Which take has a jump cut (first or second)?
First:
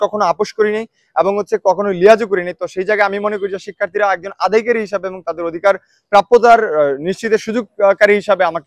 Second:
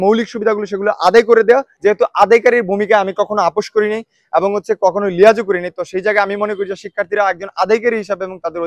second